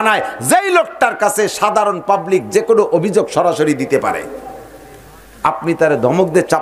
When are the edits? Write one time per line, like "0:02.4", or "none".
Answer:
none